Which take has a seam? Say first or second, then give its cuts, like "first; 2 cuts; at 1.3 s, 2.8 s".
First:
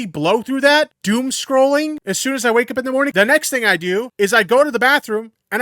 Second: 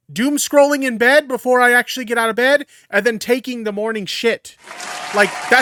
first; 4 cuts; at 1.0 s, 2.0 s, 3.1 s, 4.1 s